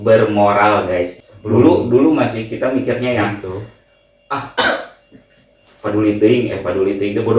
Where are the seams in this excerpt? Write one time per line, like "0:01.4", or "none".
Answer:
0:01.2